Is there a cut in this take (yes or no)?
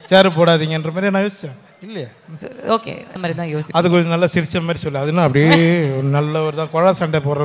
yes